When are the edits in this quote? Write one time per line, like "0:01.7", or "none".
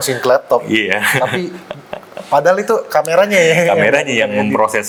none